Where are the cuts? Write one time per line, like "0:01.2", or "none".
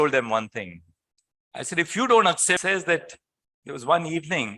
0:02.6